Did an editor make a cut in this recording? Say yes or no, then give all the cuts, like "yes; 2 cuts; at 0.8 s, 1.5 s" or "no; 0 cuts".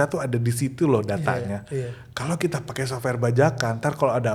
no; 0 cuts